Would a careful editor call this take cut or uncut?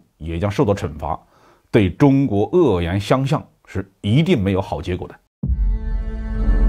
cut